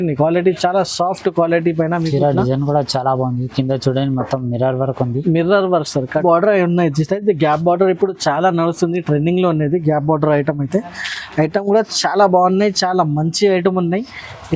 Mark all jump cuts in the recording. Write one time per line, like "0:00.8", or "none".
0:06.2